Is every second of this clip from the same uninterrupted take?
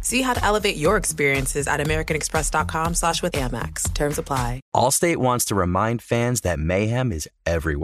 no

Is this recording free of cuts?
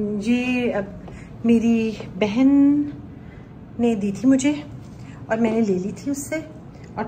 yes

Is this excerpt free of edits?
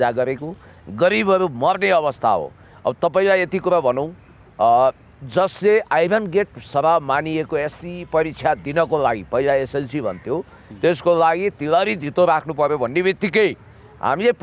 yes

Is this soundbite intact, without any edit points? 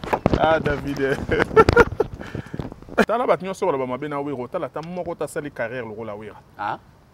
no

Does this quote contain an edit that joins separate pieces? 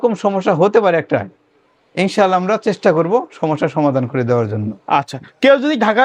no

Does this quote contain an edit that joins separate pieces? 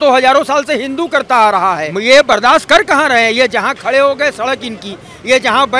yes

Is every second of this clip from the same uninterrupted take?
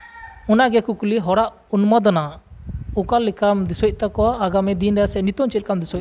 yes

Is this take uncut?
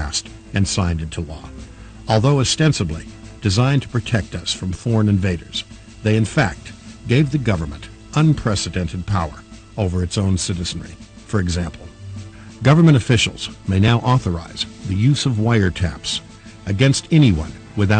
no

